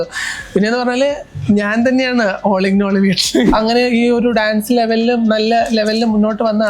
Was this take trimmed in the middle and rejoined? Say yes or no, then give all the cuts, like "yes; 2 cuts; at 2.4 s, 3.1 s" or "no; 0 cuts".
yes; 1 cut; at 3.5 s